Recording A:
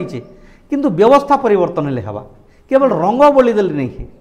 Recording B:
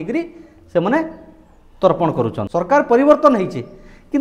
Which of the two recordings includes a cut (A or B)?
B